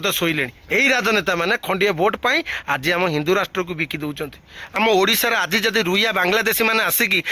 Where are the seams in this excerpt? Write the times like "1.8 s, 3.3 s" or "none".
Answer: 4.7 s